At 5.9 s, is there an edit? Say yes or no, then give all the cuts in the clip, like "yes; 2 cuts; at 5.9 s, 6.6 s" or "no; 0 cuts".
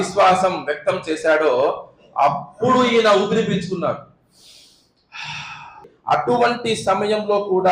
yes; 1 cut; at 5.9 s